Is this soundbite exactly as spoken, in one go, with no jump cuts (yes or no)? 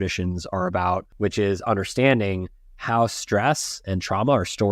no